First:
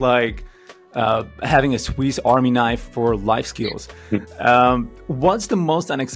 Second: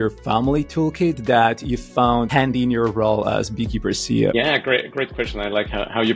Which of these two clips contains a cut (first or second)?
second